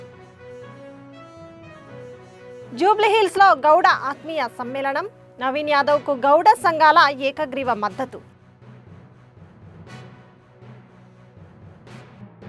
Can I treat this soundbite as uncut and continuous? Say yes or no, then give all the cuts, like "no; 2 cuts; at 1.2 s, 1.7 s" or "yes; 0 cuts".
yes; 0 cuts